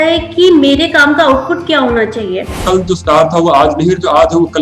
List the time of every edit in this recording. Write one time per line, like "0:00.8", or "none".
0:02.6